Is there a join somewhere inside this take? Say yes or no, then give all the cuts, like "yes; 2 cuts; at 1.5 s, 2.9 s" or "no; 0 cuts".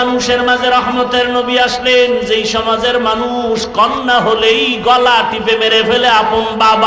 no; 0 cuts